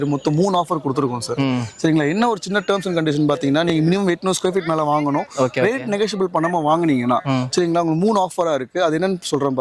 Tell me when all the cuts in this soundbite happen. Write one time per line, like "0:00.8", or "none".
none